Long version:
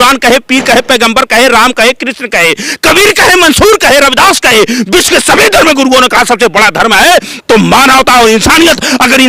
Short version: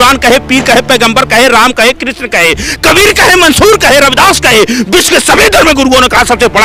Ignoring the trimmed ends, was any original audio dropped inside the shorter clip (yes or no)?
no